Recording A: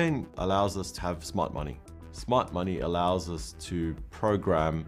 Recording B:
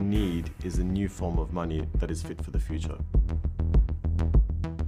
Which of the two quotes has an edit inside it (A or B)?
B